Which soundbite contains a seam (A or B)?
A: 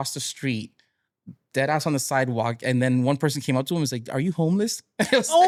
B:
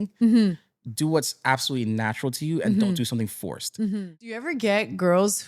B